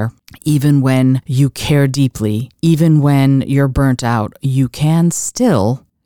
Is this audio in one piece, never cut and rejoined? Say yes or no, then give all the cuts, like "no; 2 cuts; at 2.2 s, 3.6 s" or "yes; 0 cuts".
no; 2 cuts; at 1.3 s, 2.5 s